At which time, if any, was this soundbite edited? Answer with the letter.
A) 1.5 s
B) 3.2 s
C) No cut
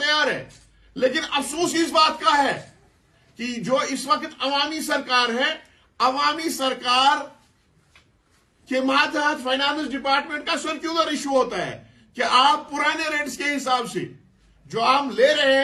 C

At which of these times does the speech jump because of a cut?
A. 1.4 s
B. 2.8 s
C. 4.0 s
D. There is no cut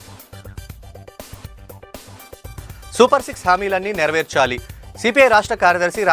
B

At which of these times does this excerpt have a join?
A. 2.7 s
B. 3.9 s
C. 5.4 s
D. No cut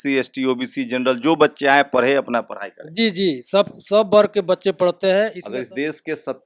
C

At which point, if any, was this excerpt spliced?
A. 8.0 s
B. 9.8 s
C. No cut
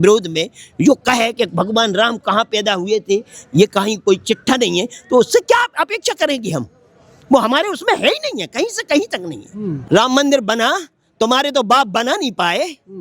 B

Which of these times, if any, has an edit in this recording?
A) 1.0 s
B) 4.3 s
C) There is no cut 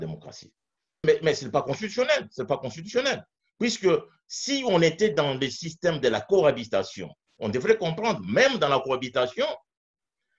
A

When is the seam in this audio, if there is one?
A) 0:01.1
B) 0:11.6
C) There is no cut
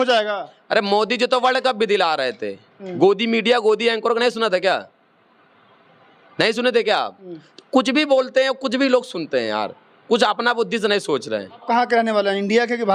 B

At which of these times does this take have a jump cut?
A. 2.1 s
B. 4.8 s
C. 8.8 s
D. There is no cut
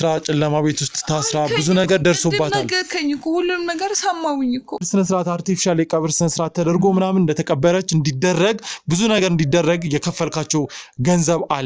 B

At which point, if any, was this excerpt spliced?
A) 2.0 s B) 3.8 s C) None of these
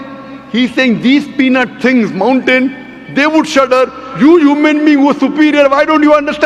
C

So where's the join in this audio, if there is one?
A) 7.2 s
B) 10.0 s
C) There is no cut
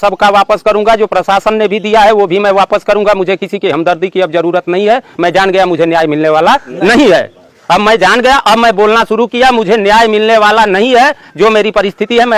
C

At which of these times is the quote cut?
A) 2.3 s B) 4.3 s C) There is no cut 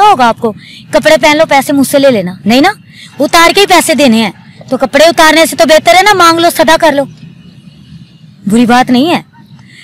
C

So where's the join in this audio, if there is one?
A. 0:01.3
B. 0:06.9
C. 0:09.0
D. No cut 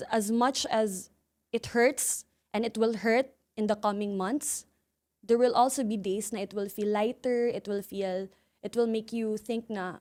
D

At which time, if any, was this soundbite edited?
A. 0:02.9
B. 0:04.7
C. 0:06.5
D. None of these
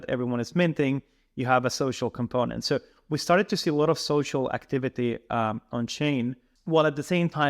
C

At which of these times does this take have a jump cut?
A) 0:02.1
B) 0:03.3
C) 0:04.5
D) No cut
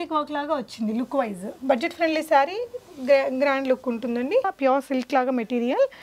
C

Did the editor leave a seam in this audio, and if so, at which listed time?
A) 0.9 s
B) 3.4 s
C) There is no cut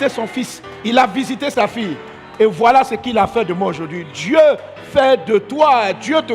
C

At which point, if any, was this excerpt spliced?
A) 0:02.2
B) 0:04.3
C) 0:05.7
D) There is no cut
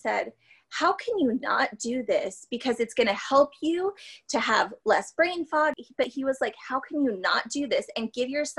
C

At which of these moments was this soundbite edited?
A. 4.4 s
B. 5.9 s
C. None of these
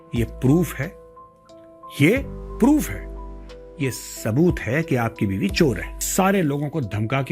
B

